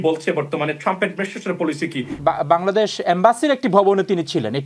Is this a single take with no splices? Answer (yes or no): no